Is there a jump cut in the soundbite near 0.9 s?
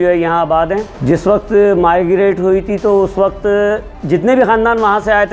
yes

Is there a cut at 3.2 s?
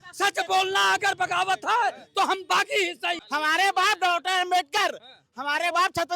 yes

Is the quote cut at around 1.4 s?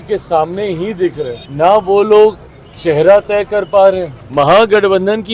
yes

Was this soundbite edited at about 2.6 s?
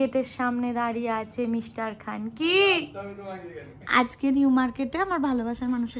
no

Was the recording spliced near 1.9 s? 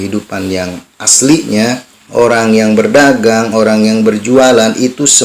yes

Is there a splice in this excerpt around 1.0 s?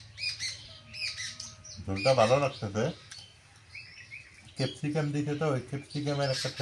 no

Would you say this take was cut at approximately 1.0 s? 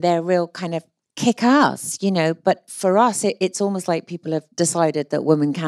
no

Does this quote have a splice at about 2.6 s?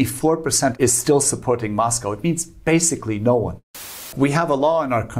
no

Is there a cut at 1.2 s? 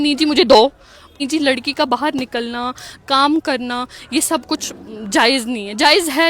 yes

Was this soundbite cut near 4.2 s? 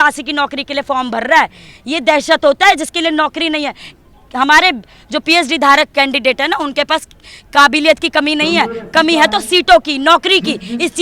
no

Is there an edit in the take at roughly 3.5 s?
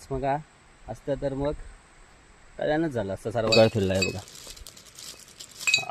yes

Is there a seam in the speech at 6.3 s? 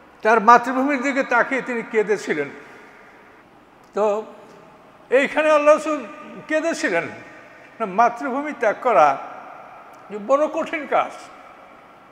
no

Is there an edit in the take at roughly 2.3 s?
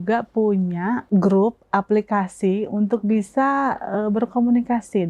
no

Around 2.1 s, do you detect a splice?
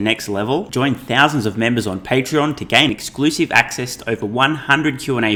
no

